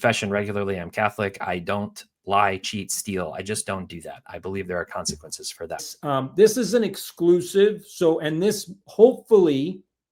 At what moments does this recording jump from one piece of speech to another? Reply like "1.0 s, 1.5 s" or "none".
5.9 s